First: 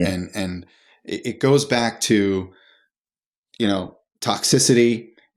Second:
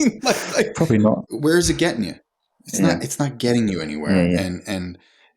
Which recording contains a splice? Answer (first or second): second